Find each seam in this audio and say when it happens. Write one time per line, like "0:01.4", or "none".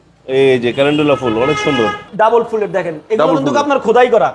0:02.0